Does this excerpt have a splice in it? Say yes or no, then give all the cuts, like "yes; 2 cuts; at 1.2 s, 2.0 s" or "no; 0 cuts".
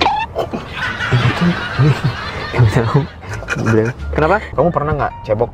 yes; 1 cut; at 4.5 s